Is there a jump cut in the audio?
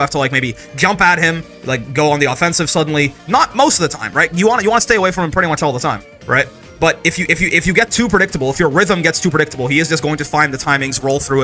no; 0 cuts

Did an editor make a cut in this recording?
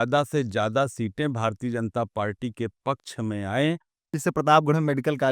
yes; 1 cut; at 4.2 s

